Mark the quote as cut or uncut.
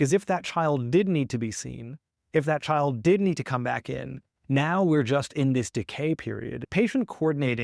cut